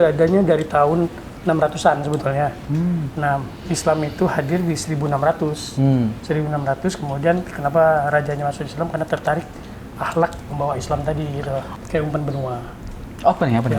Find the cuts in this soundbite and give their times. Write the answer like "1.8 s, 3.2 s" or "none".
11.7 s